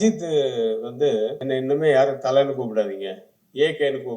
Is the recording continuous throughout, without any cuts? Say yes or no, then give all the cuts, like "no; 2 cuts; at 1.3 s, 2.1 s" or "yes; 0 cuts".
no; 1 cut; at 1.4 s